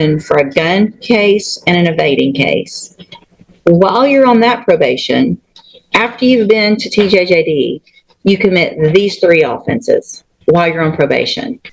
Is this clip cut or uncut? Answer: uncut